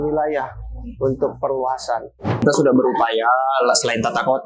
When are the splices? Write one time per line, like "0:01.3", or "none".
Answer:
0:02.4